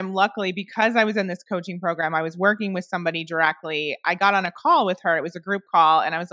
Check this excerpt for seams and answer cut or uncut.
uncut